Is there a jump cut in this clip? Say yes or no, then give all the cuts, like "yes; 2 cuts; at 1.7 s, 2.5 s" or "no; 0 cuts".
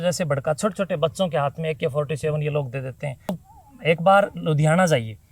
yes; 1 cut; at 3.4 s